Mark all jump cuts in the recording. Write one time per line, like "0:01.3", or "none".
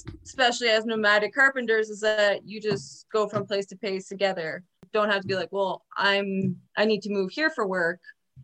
0:04.8